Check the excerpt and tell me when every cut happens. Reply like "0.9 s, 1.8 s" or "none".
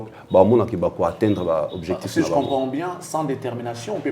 none